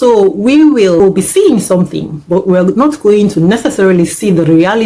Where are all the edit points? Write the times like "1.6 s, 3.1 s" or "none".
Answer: 1.0 s